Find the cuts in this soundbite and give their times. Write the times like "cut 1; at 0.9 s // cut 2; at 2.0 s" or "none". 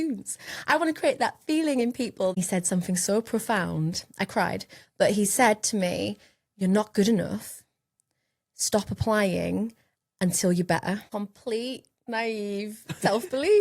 cut 1; at 2.4 s // cut 2; at 11.1 s